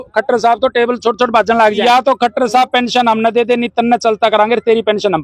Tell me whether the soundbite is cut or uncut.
cut